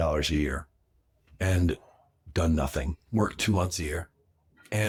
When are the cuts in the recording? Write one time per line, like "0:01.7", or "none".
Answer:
none